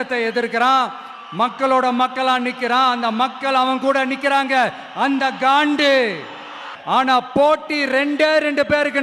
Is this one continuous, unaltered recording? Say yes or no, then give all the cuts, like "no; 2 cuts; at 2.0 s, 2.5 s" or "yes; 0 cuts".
no; 1 cut; at 6.7 s